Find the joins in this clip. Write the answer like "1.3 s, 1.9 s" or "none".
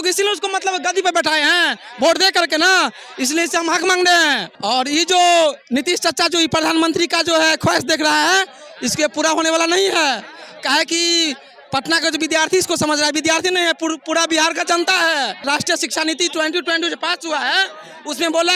4.5 s, 15.4 s